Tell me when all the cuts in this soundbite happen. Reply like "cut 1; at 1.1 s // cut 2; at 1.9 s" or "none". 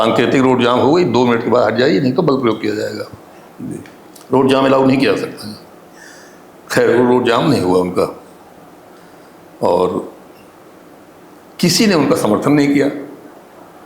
none